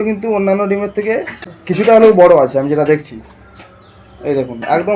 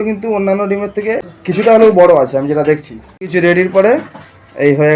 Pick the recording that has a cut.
second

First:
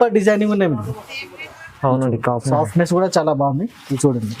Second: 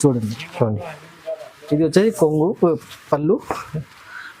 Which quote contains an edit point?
first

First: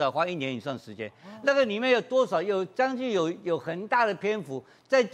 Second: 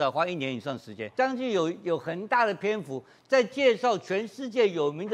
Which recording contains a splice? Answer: second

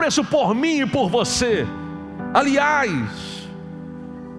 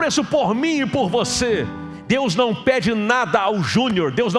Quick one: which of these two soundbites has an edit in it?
second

